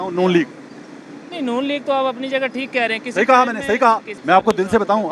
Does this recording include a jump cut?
yes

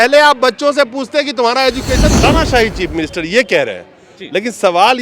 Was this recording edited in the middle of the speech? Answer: yes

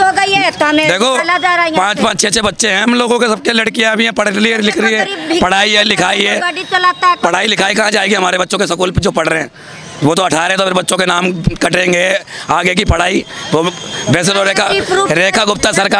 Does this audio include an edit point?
no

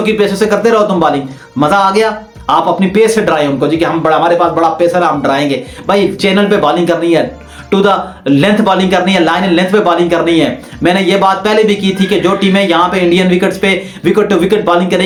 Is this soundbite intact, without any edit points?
yes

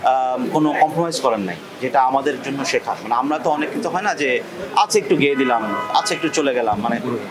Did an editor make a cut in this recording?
no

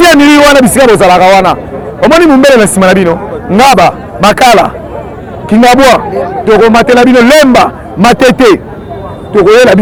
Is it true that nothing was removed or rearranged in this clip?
yes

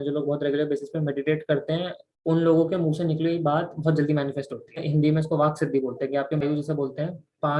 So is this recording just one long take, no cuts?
no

